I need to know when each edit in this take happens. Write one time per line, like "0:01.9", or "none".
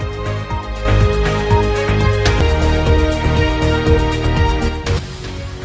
0:02.4